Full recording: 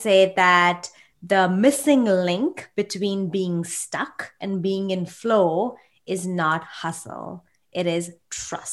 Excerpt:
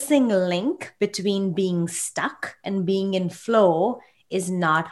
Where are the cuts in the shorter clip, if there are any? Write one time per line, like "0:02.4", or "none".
none